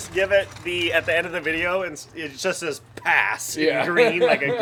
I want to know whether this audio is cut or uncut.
uncut